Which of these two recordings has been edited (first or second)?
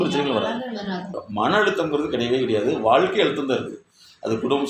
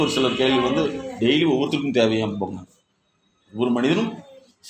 first